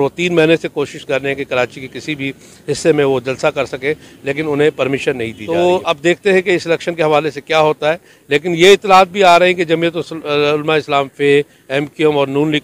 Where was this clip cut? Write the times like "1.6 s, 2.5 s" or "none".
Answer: 5.4 s